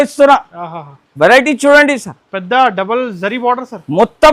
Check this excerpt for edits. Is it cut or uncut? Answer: uncut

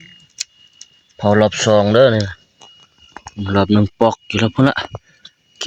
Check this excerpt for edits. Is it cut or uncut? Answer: uncut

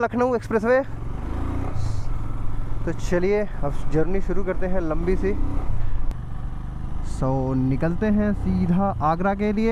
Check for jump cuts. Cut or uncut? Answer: uncut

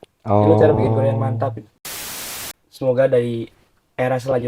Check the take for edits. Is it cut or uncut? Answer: cut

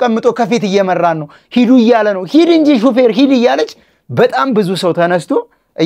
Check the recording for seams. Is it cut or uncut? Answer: uncut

